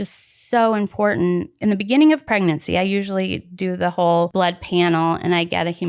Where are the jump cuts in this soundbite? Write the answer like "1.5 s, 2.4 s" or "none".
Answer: 1.6 s, 2.2 s, 4.3 s